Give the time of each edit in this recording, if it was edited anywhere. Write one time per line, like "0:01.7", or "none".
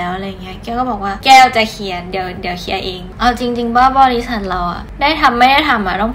0:01.2
0:03.0